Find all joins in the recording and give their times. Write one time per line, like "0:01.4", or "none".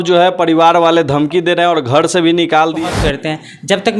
0:02.8